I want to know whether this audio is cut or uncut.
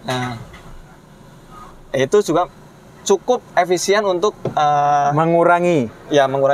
uncut